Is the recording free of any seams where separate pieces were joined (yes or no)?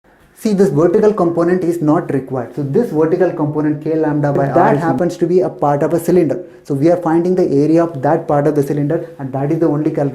no